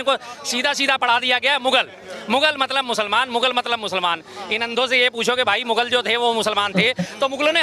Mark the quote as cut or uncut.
uncut